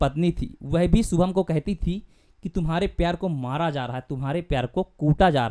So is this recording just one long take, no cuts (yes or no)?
yes